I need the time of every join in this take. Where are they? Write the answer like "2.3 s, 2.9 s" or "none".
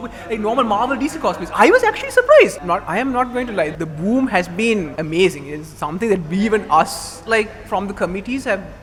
none